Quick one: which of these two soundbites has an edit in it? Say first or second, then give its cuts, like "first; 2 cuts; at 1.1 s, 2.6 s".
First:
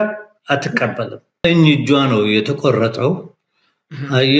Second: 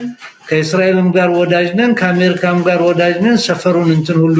first; 1 cut; at 1.4 s